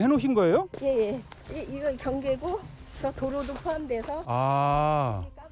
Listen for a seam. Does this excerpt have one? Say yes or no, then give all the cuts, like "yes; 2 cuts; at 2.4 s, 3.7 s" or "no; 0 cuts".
no; 0 cuts